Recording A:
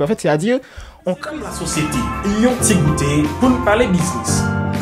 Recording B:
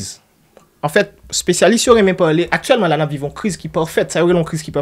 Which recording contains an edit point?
A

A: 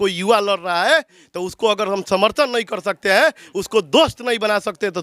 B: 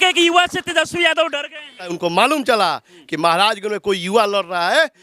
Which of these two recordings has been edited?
B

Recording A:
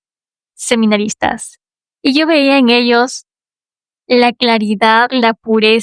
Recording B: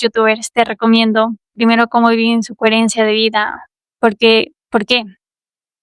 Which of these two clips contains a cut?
B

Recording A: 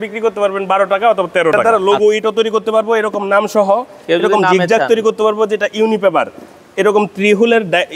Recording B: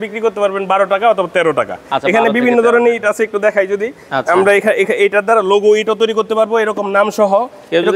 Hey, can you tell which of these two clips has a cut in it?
A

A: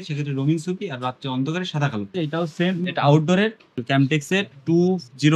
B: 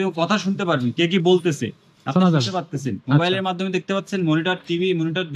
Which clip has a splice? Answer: A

